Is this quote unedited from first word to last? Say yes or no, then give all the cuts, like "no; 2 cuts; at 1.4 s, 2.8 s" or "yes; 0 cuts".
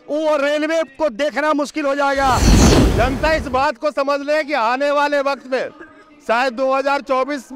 no; 1 cut; at 2.5 s